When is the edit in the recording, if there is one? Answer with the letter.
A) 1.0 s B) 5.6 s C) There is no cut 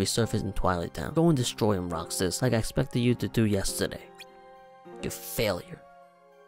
A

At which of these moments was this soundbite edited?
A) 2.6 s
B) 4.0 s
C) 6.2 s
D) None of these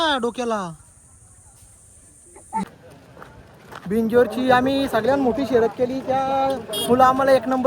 A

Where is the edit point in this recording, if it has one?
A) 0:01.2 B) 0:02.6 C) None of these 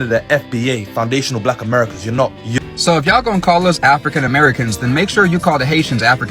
B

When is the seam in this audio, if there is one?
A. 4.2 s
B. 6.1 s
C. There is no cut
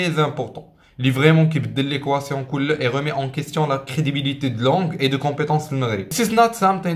B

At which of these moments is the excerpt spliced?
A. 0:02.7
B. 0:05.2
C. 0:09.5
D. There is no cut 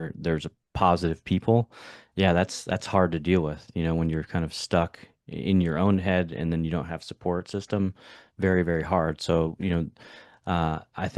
D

